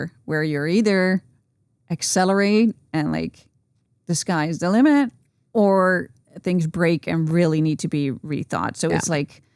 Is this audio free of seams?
yes; 0 cuts

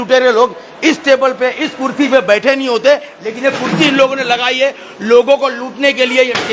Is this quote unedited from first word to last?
yes; 0 cuts

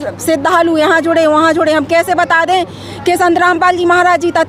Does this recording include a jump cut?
no; 0 cuts

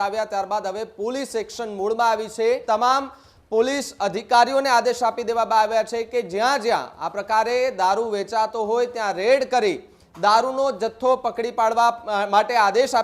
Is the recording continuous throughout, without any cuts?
no; 1 cut; at 2.6 s

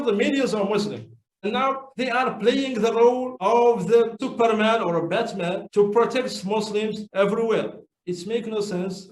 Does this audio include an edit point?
yes; 1 cut; at 4.2 s

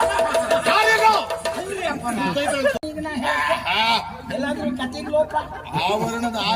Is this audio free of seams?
no; 1 cut; at 2.8 s

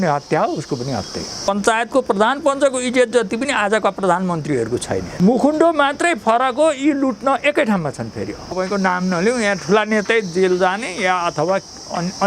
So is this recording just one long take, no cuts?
no; 3 cuts; at 1.5 s, 5.1 s, 8.5 s

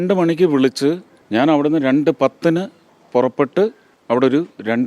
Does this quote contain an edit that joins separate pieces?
yes; 2 cuts; at 1.1 s, 3.9 s

